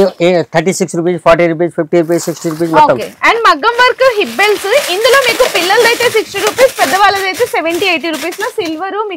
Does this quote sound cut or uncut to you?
uncut